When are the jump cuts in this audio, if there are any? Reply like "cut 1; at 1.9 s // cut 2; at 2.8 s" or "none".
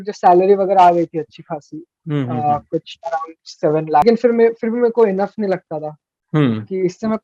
cut 1; at 4.0 s